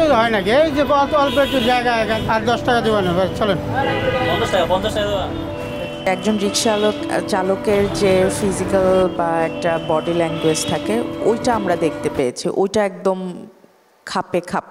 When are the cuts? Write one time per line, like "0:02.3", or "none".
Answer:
0:05.6